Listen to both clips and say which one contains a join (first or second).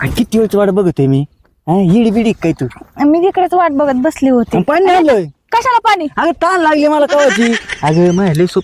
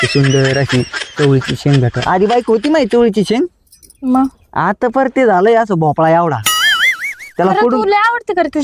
first